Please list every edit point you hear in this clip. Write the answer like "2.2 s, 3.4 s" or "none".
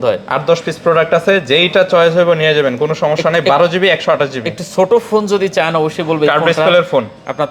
none